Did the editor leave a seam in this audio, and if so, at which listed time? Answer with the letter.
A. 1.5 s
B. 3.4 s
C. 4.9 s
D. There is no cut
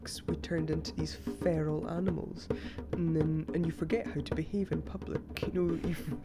D